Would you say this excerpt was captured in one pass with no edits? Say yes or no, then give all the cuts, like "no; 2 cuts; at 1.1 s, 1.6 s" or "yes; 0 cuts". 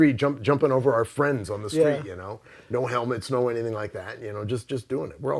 yes; 0 cuts